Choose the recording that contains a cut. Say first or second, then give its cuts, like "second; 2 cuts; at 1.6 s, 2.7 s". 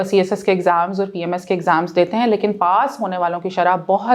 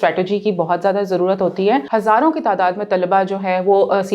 second; 1 cut; at 1.8 s